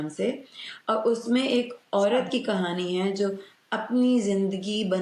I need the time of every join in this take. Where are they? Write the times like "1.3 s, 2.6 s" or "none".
none